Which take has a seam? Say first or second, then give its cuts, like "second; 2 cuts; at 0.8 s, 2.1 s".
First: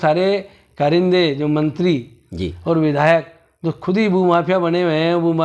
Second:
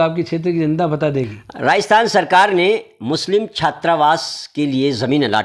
second; 1 cut; at 1.4 s